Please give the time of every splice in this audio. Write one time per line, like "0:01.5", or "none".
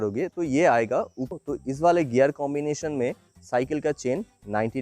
0:01.3